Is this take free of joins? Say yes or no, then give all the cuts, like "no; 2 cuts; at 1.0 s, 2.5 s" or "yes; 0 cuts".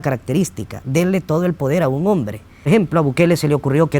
no; 1 cut; at 2.7 s